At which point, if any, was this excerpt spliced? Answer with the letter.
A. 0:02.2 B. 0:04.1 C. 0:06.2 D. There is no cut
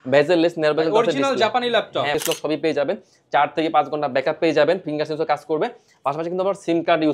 A